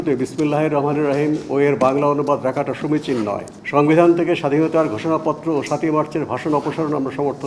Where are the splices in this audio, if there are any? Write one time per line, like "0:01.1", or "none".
0:03.5